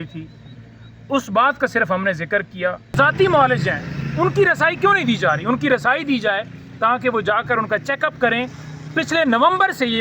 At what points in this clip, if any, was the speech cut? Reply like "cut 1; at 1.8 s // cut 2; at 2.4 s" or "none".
cut 1; at 2.9 s